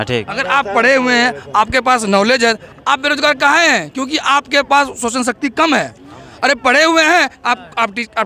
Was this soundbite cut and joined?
no; 0 cuts

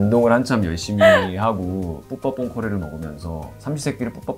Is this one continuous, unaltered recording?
yes; 0 cuts

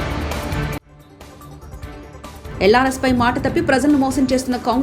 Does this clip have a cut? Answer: yes; 1 cut; at 2.1 s

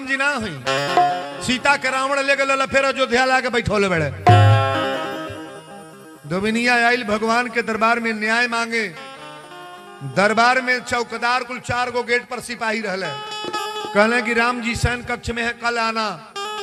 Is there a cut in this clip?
no; 0 cuts

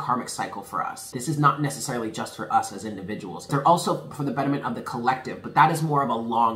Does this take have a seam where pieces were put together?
yes; 2 cuts; at 1.1 s, 3.4 s

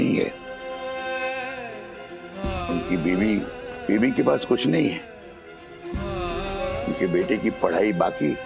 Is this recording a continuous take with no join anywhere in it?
yes; 0 cuts

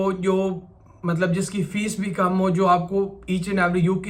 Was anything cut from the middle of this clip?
no; 0 cuts

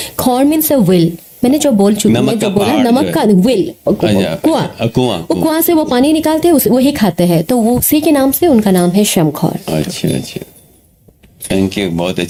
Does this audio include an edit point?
no; 0 cuts

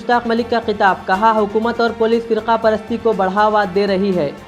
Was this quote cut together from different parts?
no; 0 cuts

